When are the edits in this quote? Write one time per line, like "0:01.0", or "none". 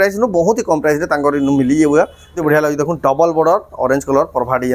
0:02.4